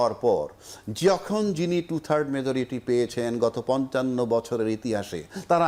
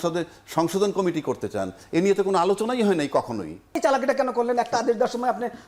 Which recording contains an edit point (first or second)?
second